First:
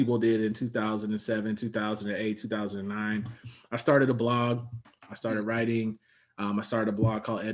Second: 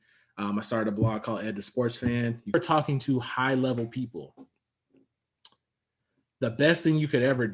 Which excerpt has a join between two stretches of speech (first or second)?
second